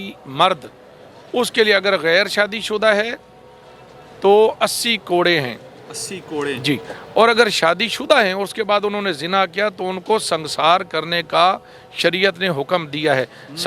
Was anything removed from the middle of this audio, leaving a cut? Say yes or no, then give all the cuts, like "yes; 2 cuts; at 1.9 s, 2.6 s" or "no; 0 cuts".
no; 0 cuts